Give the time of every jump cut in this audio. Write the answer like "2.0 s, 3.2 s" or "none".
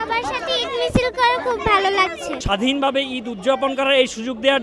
2.4 s